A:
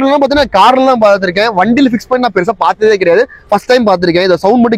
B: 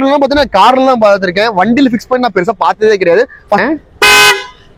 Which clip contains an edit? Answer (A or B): B